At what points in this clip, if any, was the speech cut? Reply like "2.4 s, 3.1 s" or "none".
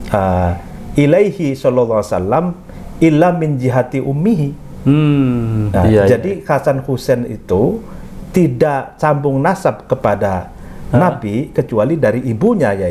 none

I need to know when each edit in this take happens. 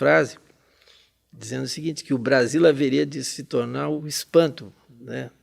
4.0 s

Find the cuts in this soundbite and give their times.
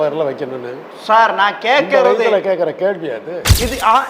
none

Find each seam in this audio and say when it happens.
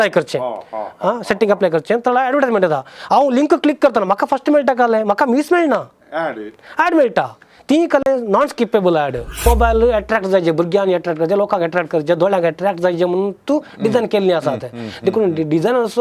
9.4 s

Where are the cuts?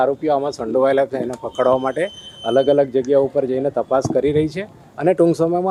none

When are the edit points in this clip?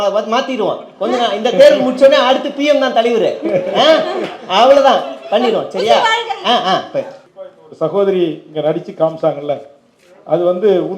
7.2 s

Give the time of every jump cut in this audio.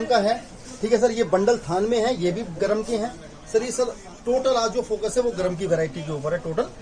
none

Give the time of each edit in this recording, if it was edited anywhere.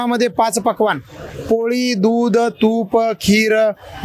none

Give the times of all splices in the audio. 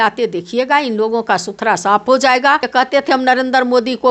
2.7 s

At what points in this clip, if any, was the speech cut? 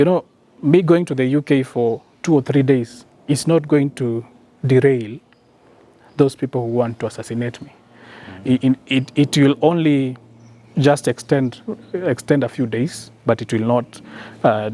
none

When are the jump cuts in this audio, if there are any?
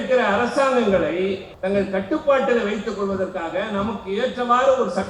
1.5 s

